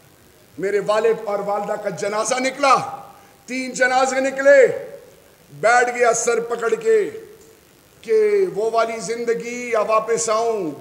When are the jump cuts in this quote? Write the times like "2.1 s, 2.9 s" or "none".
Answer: none